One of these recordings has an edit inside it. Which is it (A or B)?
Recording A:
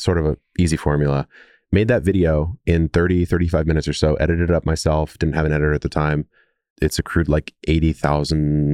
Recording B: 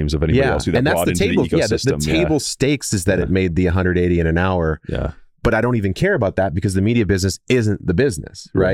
A